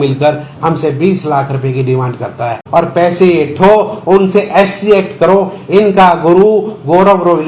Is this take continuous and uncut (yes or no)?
no